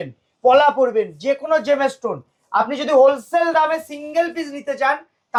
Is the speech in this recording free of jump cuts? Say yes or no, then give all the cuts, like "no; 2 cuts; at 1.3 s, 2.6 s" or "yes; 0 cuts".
yes; 0 cuts